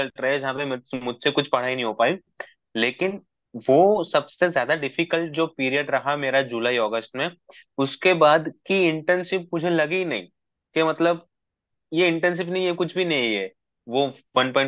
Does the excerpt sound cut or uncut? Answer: uncut